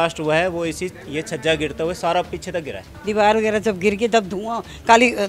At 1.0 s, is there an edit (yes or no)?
no